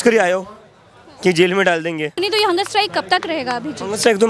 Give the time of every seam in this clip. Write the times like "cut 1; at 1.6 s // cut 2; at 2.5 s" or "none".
cut 1; at 2.1 s